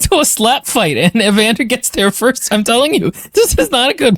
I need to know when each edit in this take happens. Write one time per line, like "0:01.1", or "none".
none